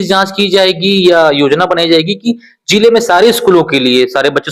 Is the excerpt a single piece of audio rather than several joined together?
yes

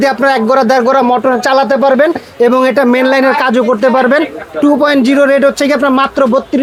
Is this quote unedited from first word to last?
yes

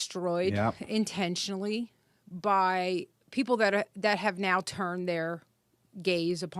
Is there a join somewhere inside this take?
no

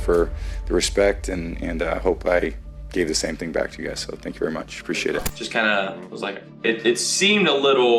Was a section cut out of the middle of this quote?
yes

